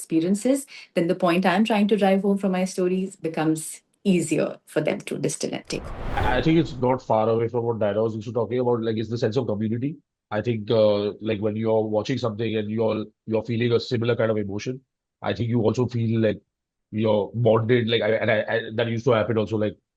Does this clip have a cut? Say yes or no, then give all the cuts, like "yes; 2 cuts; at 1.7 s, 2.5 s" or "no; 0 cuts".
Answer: yes; 1 cut; at 6.2 s